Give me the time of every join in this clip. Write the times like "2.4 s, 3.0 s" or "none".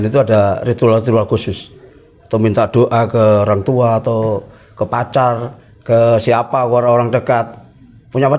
none